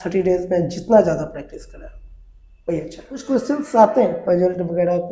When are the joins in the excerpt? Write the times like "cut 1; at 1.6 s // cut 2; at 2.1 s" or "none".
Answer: cut 1; at 3.1 s